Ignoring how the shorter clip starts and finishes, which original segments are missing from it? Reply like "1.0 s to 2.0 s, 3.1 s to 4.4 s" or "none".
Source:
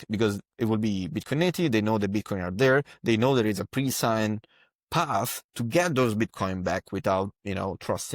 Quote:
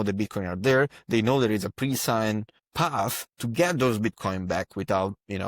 4.5 s to 4.7 s